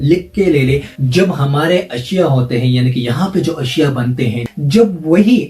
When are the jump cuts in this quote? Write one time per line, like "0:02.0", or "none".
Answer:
0:01.0
0:04.4